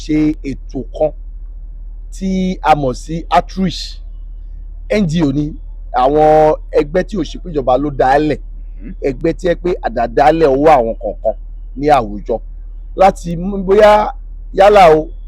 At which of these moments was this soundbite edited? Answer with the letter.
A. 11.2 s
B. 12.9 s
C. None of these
C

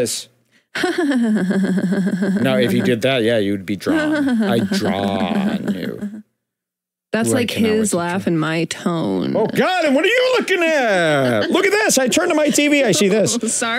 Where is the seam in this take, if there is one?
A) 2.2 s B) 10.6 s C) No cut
C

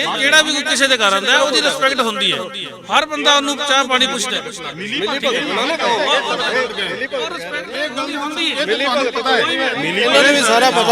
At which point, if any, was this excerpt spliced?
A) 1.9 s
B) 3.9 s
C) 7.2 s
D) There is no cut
D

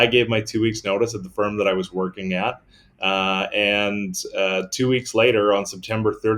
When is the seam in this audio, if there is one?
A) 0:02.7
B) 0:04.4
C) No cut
C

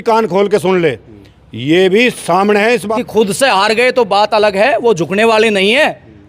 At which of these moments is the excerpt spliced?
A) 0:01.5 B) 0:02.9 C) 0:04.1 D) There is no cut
B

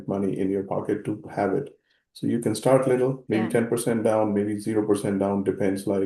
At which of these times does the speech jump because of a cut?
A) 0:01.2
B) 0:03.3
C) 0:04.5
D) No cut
B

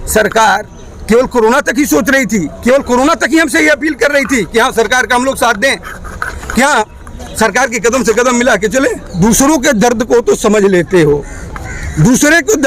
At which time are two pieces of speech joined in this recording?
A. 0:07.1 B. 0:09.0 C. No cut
B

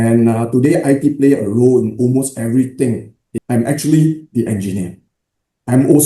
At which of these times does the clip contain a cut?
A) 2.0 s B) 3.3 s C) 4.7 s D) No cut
B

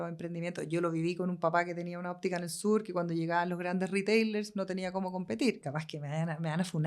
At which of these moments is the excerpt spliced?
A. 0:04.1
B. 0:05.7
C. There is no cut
B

